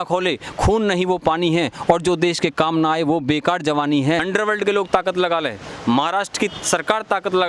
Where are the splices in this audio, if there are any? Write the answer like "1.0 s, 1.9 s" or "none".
4.3 s